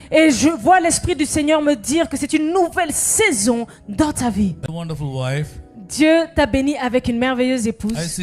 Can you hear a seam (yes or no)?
yes